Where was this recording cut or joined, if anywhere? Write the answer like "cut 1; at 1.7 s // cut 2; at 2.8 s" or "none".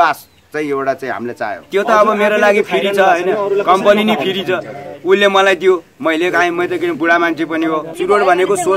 cut 1; at 1.7 s // cut 2; at 7.9 s